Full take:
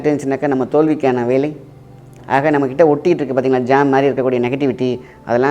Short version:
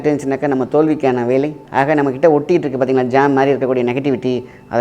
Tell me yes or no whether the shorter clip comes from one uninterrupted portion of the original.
no